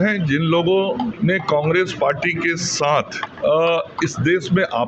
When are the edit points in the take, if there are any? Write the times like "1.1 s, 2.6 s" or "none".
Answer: 1.1 s, 3.2 s